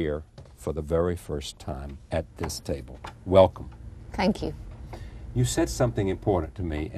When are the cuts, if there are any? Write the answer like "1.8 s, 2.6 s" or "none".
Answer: none